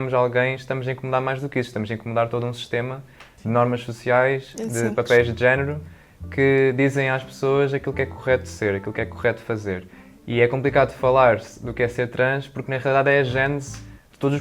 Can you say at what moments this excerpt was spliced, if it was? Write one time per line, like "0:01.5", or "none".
none